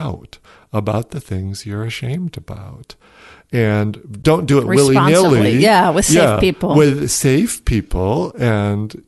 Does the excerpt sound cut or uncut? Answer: cut